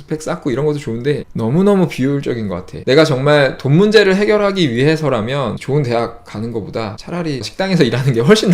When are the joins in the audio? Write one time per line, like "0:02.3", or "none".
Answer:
0:02.7
0:05.6
0:07.3